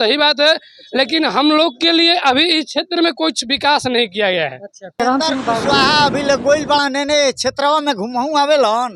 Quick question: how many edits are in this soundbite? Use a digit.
1